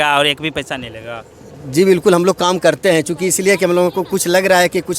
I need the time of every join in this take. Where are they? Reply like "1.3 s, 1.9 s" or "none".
none